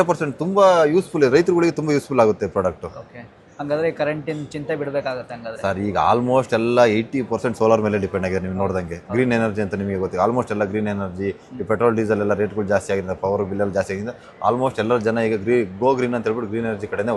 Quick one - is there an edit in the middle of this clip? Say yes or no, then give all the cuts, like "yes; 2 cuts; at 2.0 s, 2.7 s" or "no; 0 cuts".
no; 0 cuts